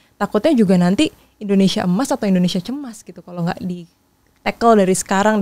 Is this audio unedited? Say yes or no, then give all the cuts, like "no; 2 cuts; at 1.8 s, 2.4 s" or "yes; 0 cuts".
yes; 0 cuts